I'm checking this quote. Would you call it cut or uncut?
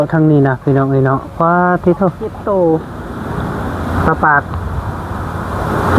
cut